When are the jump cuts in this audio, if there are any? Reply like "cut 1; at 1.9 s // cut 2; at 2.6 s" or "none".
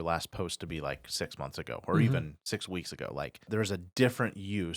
cut 1; at 3.5 s

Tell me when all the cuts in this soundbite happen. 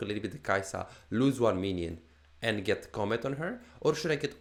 none

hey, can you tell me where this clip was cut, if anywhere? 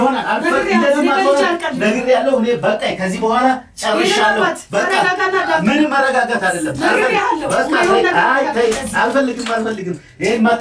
none

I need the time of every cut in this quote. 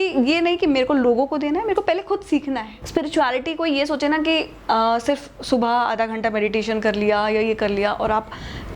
cut 1; at 2.7 s

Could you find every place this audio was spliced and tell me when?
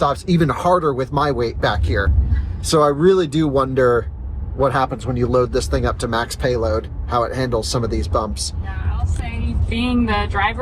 none

